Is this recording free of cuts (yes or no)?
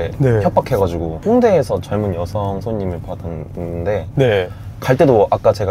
yes